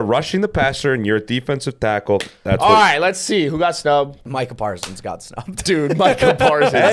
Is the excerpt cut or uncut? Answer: cut